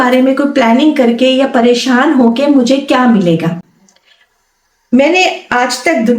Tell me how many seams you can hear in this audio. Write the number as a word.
zero